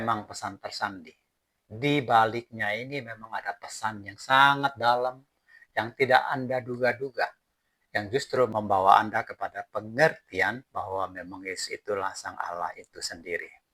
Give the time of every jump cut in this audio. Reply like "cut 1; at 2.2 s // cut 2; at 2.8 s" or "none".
cut 1; at 8.5 s